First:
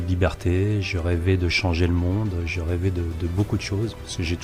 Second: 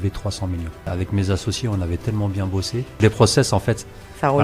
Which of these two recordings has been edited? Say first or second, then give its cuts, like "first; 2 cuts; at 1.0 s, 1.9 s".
second; 2 cuts; at 0.9 s, 2.9 s